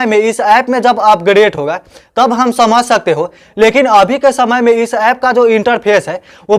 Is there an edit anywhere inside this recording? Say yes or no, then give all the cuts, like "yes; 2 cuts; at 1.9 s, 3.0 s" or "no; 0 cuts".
no; 0 cuts